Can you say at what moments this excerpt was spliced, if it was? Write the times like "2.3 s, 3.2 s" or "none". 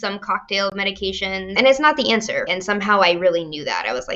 1.5 s, 2.5 s